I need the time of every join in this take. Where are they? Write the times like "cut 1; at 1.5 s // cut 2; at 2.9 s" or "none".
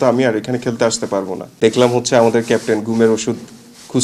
cut 1; at 1.4 s